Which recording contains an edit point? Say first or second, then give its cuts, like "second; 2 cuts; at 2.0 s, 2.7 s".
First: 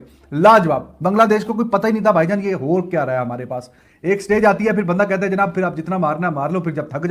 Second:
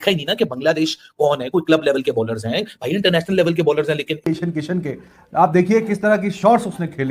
second; 1 cut; at 4.1 s